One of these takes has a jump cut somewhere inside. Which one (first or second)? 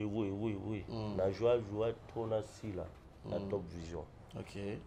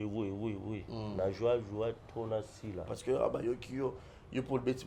second